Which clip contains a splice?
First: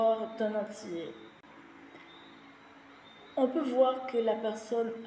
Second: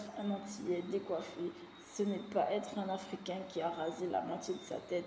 first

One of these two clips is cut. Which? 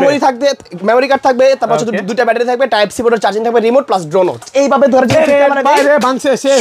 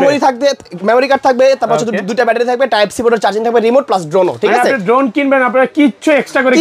first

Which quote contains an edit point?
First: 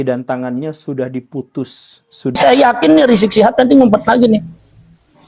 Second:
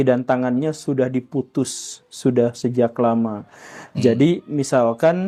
first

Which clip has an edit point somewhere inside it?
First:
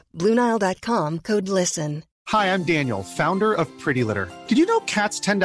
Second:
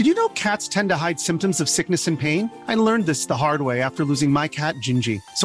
first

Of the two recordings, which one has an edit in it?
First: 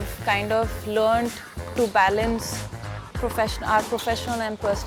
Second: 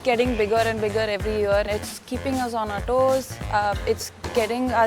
second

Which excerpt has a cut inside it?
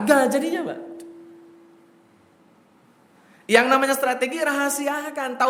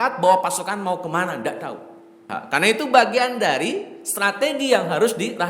second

